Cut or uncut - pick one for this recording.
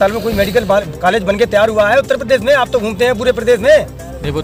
uncut